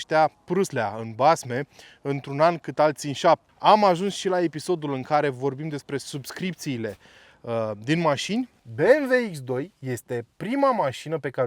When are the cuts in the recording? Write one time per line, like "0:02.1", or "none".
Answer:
0:03.5
0:08.6

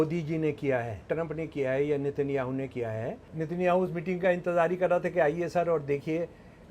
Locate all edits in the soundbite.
0:01.0
0:03.2

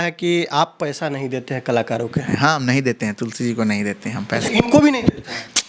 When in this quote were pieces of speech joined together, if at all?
0:02.3
0:04.4

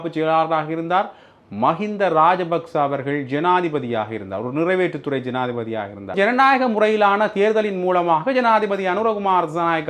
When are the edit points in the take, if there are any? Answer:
0:06.1

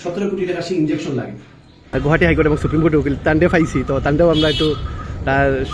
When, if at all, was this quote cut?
0:01.9

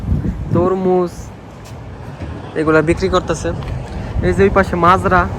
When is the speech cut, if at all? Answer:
none

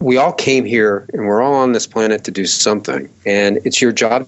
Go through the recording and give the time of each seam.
0:03.1

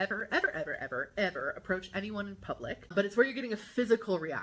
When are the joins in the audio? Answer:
0:02.8

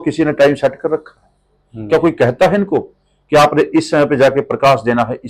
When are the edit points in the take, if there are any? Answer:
none

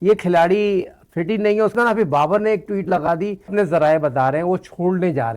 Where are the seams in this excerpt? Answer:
0:01.7
0:03.5

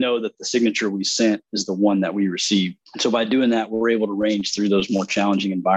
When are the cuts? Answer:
0:02.9

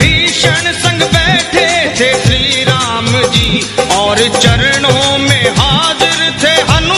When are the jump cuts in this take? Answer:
none

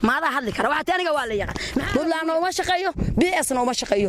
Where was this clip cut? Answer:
0:01.9

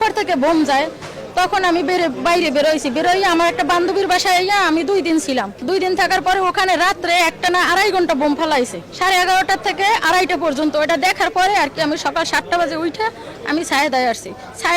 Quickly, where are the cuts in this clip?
none

